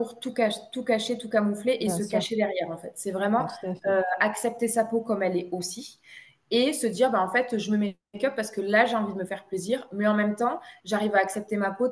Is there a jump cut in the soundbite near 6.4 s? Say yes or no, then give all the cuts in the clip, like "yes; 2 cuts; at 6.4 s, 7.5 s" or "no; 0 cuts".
no; 0 cuts